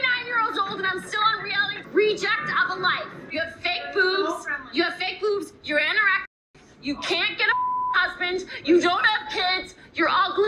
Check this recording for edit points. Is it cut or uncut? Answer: cut